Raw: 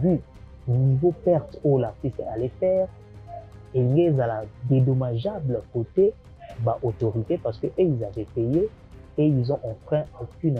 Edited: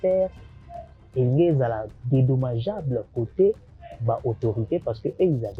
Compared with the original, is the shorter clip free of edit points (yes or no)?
yes